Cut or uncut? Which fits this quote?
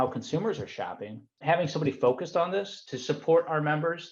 cut